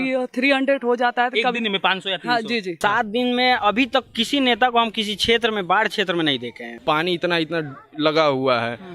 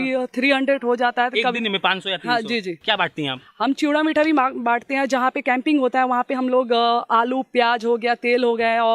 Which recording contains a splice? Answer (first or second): first